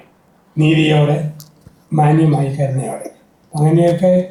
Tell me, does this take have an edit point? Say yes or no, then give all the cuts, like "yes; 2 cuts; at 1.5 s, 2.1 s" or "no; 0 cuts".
no; 0 cuts